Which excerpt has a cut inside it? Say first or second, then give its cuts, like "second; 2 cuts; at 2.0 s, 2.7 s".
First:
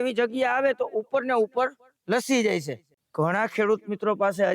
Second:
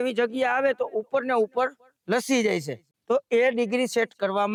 first; 1 cut; at 2.9 s